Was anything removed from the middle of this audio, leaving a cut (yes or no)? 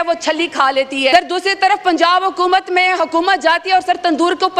yes